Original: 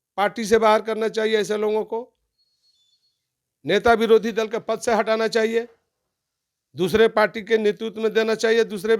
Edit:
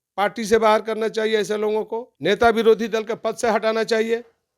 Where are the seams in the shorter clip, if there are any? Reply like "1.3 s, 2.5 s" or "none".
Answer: 2.1 s